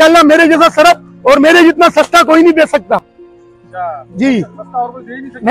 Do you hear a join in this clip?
no; 0 cuts

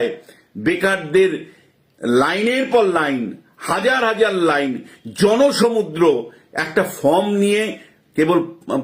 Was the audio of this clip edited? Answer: no; 0 cuts

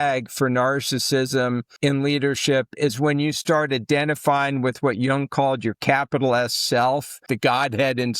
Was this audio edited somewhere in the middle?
yes; 2 cuts; at 1.7 s, 7.3 s

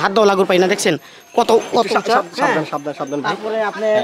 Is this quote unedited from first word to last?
yes; 0 cuts

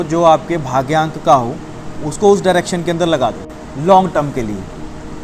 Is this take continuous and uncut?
yes; 0 cuts

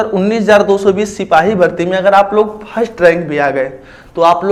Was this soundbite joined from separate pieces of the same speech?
no; 0 cuts

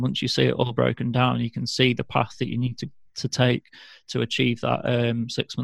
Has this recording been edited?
no; 0 cuts

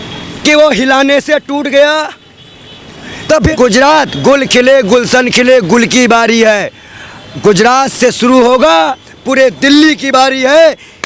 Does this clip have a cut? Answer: yes; 1 cut; at 3.5 s

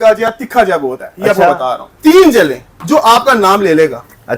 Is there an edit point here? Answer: yes; 1 cut; at 1.9 s

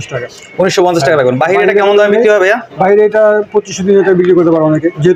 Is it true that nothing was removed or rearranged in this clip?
yes; 0 cuts

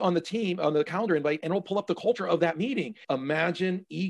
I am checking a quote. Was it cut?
yes; 1 cut; at 3.0 s

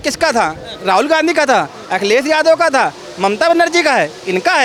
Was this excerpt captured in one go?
yes; 0 cuts

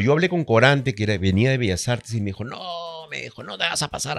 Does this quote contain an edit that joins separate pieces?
no; 0 cuts

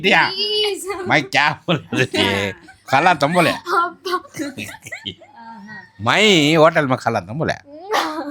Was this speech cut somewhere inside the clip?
no; 0 cuts

